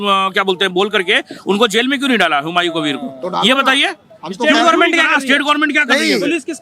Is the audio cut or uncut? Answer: uncut